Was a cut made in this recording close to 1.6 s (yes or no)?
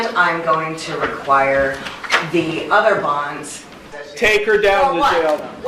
no